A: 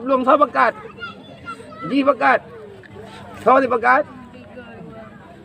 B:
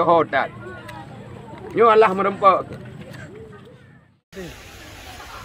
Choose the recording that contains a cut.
B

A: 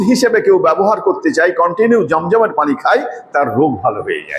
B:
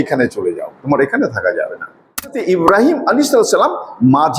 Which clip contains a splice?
B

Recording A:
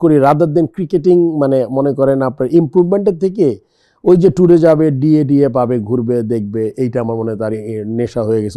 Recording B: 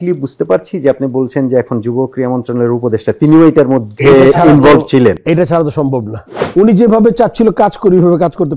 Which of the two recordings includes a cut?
B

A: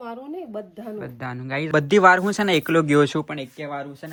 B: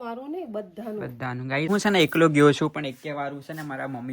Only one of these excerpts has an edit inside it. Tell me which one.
B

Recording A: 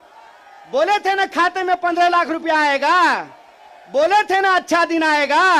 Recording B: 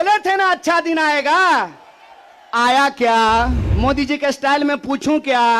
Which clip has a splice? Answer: B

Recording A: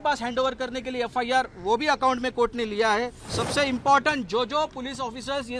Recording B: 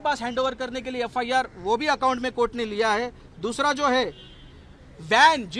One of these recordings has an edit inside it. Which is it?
A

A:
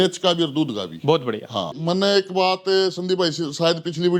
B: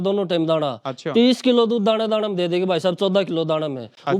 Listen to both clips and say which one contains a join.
A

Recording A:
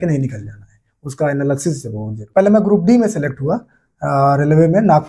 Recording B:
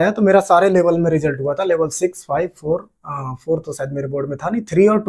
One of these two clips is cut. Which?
A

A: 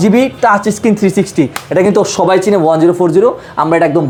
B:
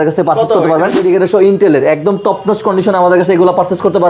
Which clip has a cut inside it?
B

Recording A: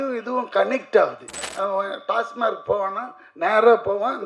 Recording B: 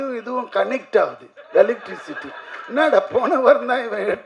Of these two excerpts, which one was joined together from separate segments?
A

